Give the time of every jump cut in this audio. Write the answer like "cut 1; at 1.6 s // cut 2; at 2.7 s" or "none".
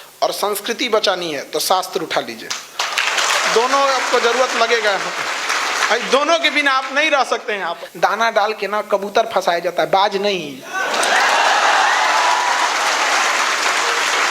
cut 1; at 7.8 s